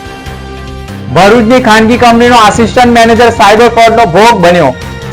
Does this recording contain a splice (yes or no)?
no